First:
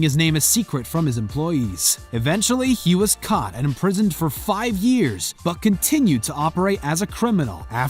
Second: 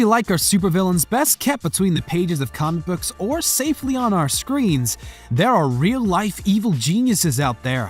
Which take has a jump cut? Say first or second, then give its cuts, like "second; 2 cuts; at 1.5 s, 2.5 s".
second; 1 cut; at 4.4 s